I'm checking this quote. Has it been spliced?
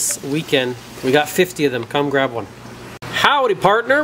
yes; 1 cut; at 2.8 s

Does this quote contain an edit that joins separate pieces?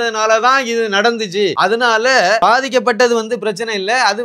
yes; 2 cuts; at 1.5 s, 2.4 s

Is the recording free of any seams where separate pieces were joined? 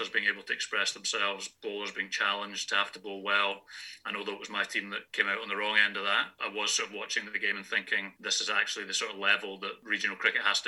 no; 4 cuts; at 5.0 s, 6.3 s, 8.1 s, 9.8 s

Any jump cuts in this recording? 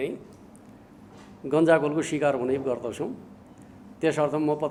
no; 0 cuts

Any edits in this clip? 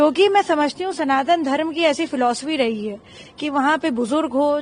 no; 0 cuts

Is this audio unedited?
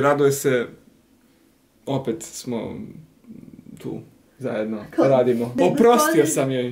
no; 1 cut; at 5.5 s

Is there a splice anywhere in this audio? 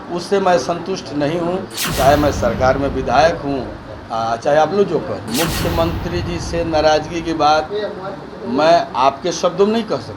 yes; 1 cut; at 5.3 s

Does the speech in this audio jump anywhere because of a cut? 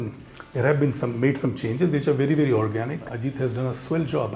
yes; 1 cut; at 3.1 s

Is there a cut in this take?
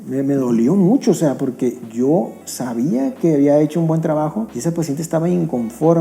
yes; 1 cut; at 4.5 s

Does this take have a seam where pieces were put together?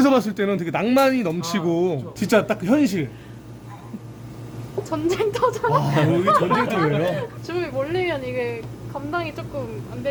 no; 0 cuts

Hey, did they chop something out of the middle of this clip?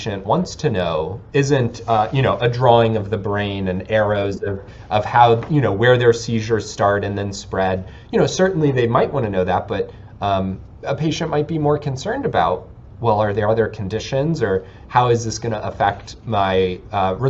no; 0 cuts

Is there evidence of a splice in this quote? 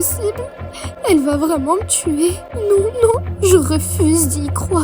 no; 0 cuts

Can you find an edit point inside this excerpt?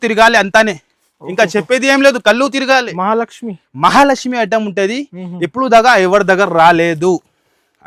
no; 0 cuts

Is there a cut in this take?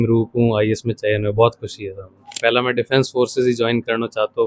yes; 1 cut; at 2.3 s

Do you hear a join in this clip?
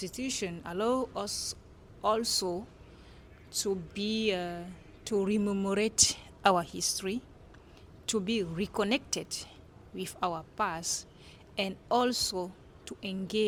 no; 0 cuts

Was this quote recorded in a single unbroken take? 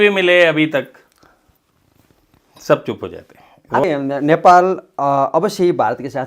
no; 1 cut; at 3.8 s

